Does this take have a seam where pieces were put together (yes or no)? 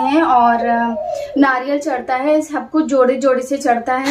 no